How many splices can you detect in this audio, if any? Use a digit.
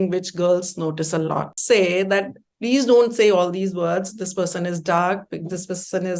1